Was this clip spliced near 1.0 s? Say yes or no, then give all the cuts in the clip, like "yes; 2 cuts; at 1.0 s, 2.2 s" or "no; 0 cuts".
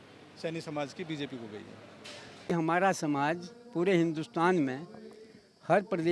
no; 1 cut; at 2.4 s